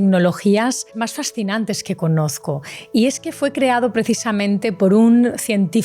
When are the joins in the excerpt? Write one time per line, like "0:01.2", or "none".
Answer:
0:00.9